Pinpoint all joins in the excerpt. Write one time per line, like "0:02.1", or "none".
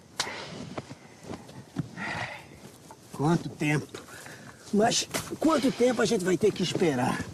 none